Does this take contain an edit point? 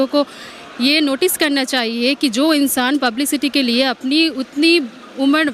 no; 0 cuts

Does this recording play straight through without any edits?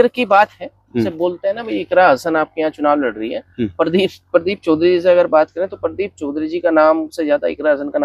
yes; 0 cuts

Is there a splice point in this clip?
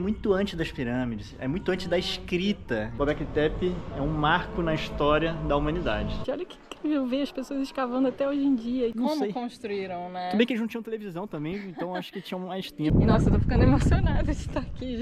yes; 4 cuts; at 2.9 s, 6.2 s, 8.9 s, 12.9 s

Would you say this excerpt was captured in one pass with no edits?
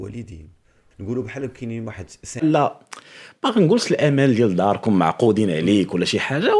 no; 2 cuts; at 0.9 s, 2.4 s

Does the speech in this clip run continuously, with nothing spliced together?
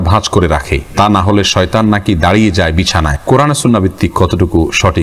no; 1 cut; at 3.1 s

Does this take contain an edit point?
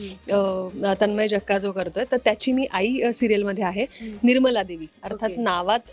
no; 0 cuts

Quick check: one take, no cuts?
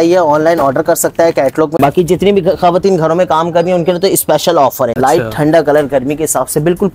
no; 2 cuts; at 1.8 s, 4.9 s

